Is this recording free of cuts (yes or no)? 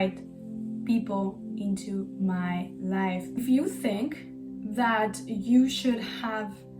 no